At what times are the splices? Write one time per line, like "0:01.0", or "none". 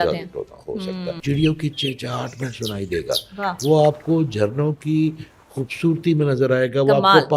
0:01.1

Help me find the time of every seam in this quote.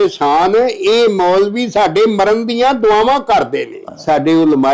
0:03.8

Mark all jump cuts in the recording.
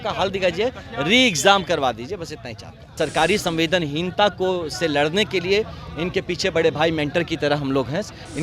0:02.9

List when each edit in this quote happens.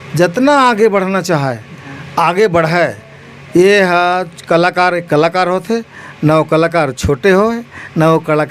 none

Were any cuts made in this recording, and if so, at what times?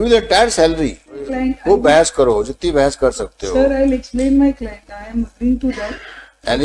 0:01.3

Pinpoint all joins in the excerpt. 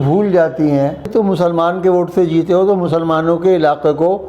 0:01.1

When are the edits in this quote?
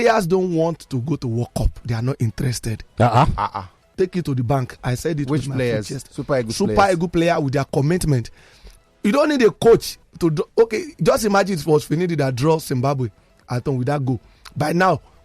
none

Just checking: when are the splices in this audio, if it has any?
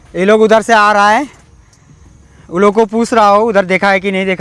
none

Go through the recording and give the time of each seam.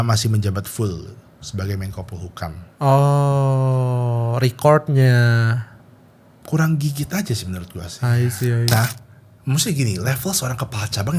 0:08.7

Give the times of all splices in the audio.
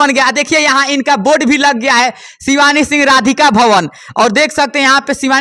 none

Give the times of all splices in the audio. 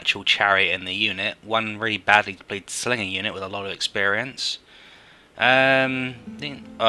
0:01.1

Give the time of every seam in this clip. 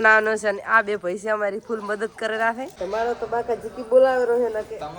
0:02.7

